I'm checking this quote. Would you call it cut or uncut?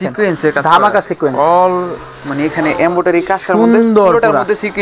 uncut